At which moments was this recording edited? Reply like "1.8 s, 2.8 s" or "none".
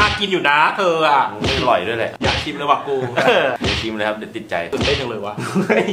2.1 s, 4.7 s